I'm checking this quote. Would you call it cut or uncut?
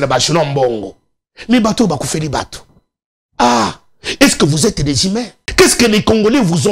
cut